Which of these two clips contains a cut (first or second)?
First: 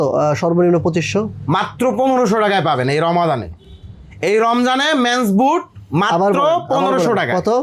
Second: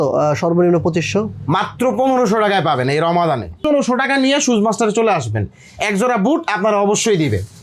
second